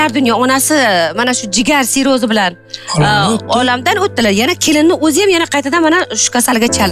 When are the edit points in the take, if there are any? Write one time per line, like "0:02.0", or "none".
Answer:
none